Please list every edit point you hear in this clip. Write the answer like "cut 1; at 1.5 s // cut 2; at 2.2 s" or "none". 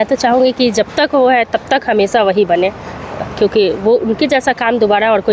none